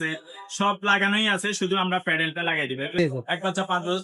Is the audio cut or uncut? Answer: cut